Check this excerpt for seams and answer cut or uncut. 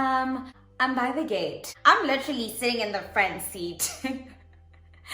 cut